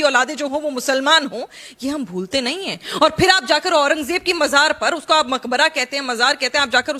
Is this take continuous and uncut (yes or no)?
yes